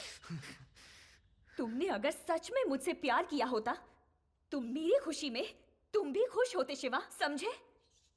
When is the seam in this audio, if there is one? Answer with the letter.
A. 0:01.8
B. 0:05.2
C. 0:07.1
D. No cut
D